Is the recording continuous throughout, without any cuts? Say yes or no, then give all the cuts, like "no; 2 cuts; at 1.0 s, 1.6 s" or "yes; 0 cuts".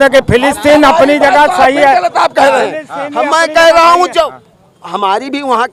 yes; 0 cuts